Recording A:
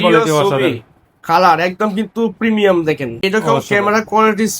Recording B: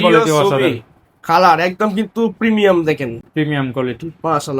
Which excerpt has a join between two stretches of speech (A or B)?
A